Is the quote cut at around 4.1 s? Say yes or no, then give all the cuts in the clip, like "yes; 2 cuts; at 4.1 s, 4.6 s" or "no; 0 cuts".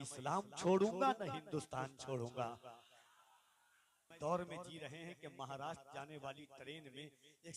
yes; 1 cut; at 4.1 s